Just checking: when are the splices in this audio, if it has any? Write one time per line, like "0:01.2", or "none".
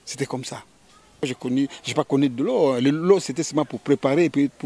0:01.2

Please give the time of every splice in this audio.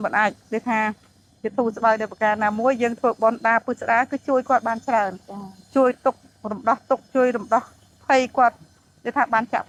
none

